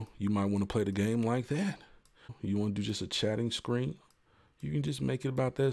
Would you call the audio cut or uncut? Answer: cut